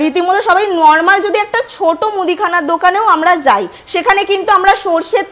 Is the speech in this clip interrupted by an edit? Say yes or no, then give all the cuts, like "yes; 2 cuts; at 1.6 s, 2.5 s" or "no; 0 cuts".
no; 0 cuts